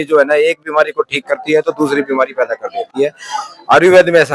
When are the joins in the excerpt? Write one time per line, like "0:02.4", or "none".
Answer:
none